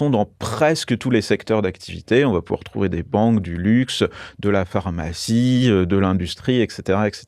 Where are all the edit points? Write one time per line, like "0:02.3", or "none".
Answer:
none